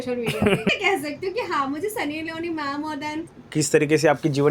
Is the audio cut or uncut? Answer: cut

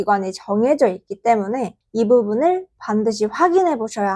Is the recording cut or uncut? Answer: cut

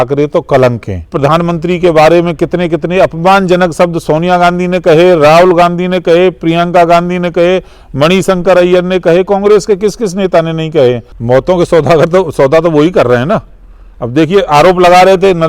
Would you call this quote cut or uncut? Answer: cut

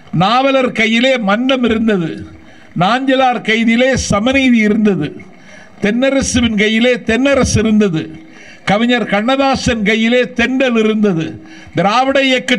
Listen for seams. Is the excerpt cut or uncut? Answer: uncut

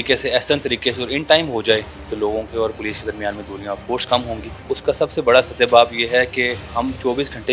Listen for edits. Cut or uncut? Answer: cut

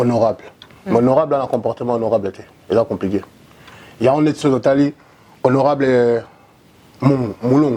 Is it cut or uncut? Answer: uncut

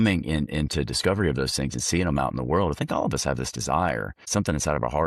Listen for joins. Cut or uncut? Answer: cut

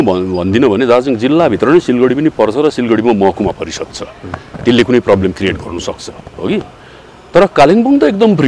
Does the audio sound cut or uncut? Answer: uncut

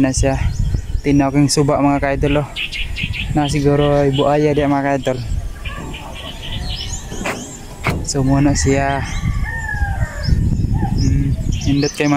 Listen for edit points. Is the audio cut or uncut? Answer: uncut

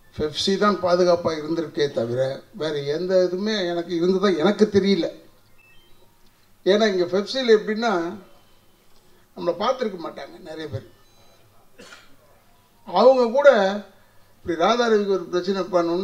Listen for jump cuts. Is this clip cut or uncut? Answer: uncut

